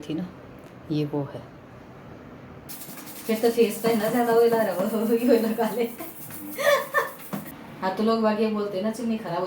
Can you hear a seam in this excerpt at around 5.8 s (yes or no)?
no